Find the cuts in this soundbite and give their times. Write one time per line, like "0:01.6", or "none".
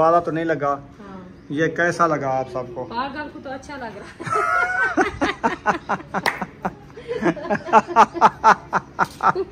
none